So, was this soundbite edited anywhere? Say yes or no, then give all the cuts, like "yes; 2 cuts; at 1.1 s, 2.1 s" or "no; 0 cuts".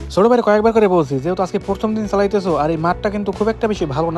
no; 0 cuts